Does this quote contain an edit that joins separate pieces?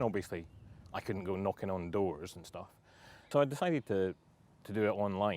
yes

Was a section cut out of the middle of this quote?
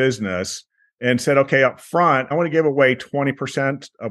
yes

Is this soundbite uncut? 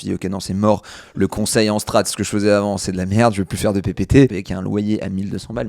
no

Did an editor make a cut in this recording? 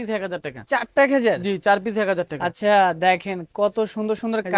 no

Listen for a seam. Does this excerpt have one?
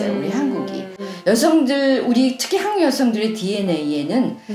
yes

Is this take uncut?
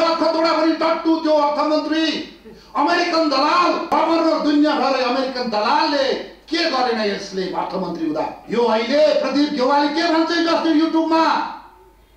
no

